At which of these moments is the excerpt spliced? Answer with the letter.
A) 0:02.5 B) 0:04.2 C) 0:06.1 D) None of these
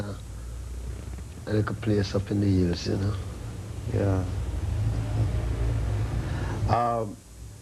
B